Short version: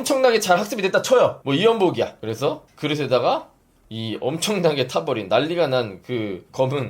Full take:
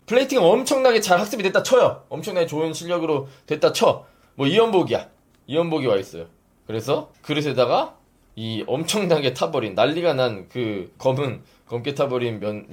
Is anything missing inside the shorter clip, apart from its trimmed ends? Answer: yes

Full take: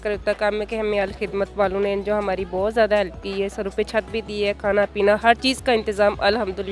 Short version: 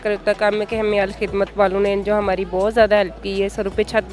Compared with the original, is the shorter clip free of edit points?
yes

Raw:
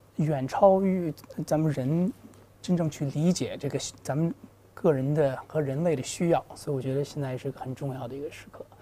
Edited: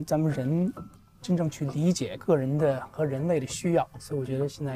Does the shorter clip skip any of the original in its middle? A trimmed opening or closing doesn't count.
yes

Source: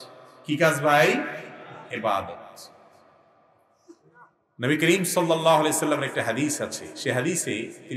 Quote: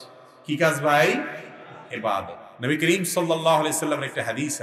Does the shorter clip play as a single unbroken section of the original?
no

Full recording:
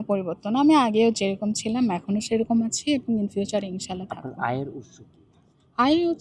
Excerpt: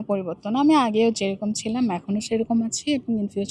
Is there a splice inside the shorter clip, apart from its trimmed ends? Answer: no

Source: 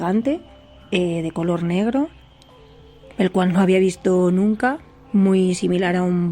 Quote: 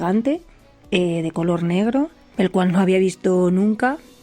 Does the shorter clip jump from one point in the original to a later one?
yes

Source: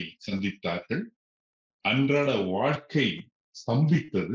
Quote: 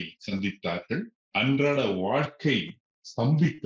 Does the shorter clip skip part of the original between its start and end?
yes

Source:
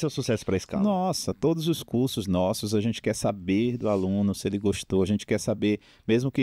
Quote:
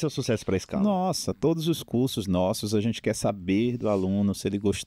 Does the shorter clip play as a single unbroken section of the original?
yes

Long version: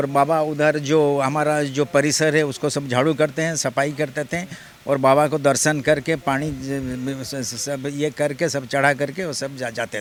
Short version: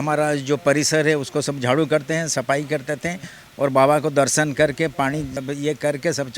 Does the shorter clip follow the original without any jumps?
no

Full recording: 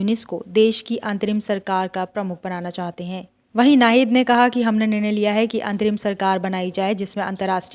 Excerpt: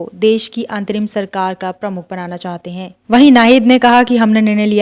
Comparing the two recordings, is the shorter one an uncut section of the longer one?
no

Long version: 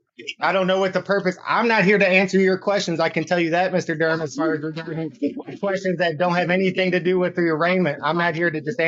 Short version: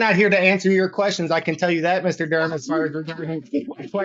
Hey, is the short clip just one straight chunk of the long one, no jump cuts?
yes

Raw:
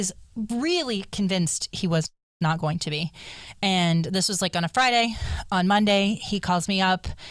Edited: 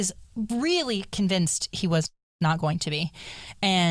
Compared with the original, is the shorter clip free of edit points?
yes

